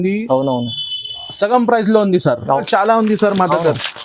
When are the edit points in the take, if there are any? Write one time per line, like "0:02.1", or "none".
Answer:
0:02.6